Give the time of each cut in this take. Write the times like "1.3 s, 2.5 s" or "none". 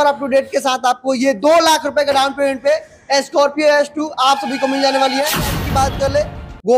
5.6 s